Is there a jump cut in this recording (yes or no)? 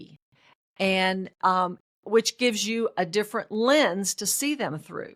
no